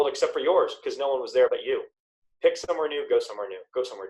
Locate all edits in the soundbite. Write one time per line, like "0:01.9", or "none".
0:01.5